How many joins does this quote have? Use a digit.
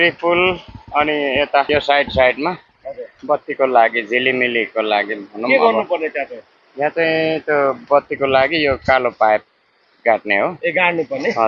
0